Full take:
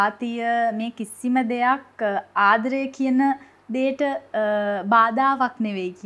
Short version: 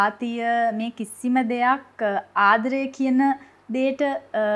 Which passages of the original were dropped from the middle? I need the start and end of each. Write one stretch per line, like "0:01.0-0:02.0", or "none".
none